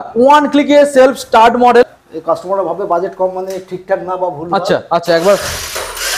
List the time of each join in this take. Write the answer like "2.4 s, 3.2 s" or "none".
2.0 s

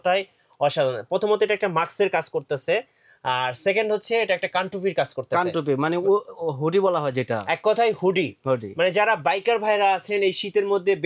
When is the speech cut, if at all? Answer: none

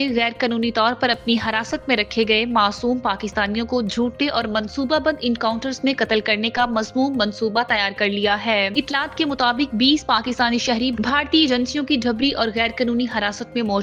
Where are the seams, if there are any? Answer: none

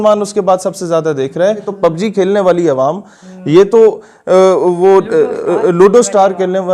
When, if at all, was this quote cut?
1.7 s

